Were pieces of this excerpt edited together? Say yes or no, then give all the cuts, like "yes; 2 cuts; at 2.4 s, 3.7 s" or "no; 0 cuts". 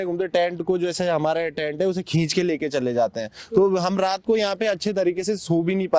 no; 0 cuts